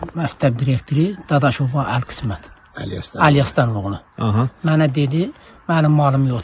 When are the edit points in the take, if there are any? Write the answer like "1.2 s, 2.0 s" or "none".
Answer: none